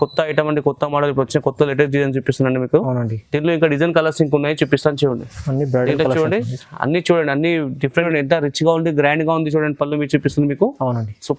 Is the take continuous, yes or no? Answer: no